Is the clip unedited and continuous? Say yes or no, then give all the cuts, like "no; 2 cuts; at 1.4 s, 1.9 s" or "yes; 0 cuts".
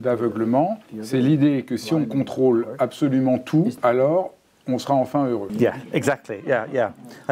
no; 2 cuts; at 3.8 s, 5.5 s